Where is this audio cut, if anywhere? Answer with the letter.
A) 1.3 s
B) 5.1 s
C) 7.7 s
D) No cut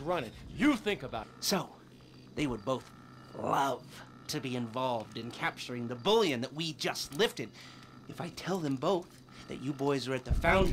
A